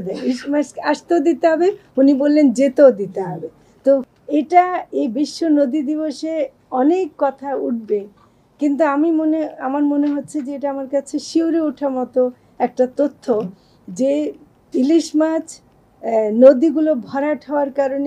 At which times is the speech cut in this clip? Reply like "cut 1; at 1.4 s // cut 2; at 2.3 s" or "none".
cut 1; at 4.1 s